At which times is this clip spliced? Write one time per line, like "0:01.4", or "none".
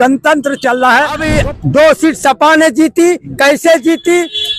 0:01.3